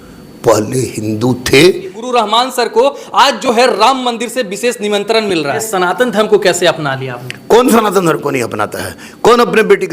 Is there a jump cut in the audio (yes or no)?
yes